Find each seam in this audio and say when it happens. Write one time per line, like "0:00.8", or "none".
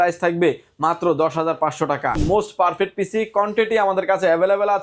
0:02.2

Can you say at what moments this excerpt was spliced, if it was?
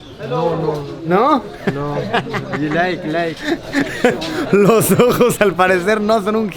none

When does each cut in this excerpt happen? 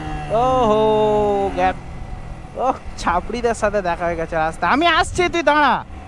0:01.8

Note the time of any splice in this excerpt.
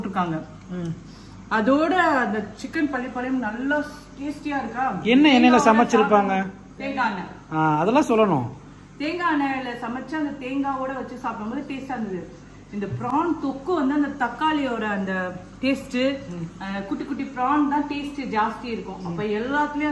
none

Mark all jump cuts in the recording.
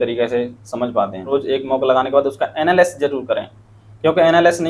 0:01.3

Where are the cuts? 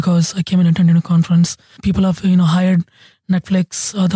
0:01.8

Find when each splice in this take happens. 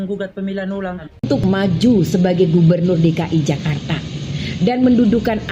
0:01.4

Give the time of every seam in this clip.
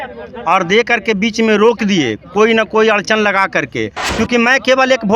0:04.0

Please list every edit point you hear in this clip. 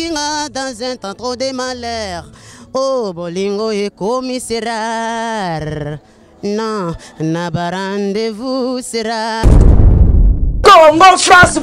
0:09.4

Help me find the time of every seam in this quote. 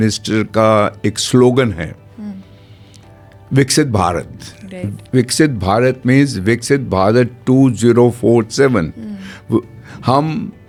none

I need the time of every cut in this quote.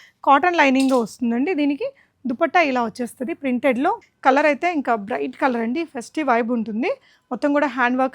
0:04.1

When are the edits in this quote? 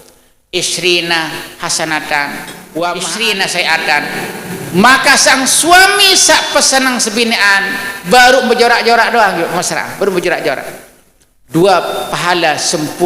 0:03.1

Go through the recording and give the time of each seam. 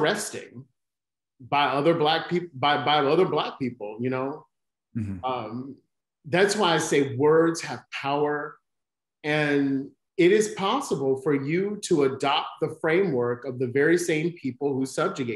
none

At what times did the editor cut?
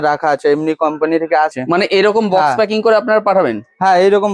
0:01.5

